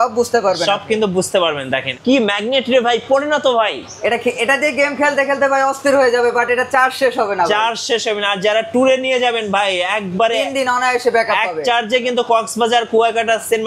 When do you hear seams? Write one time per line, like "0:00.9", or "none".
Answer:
0:01.9